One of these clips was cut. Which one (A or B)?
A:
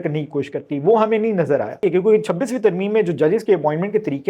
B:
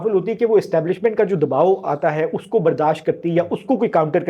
A